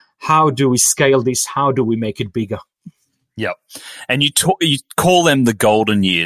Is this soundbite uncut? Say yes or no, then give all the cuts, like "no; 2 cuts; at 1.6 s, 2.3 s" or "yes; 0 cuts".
yes; 0 cuts